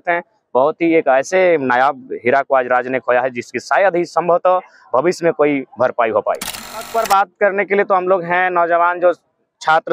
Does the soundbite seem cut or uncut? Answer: cut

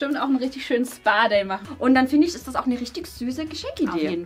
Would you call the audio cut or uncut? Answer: cut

